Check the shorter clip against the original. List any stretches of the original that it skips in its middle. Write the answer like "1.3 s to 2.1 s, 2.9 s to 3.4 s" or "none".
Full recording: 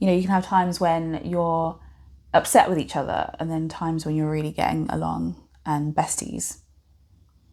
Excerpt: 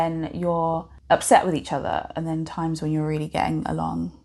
1.8 s to 2.2 s